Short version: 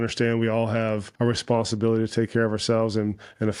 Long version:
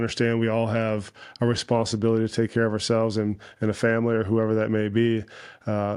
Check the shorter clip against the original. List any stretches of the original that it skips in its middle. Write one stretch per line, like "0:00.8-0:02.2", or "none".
0:01.1-0:01.3